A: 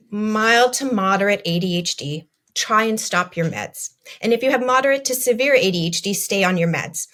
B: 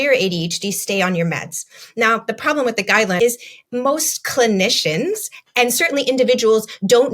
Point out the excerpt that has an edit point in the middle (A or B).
B